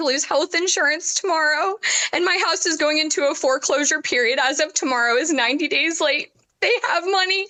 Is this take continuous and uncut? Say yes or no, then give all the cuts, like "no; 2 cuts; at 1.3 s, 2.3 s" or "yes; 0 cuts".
yes; 0 cuts